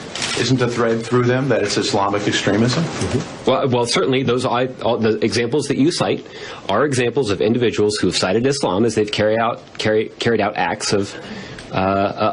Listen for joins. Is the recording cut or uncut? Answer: uncut